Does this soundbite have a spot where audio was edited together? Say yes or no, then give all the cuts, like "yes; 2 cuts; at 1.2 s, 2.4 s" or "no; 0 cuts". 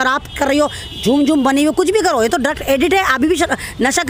no; 0 cuts